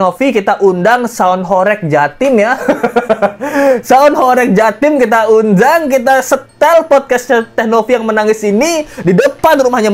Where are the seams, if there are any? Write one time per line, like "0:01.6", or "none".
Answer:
none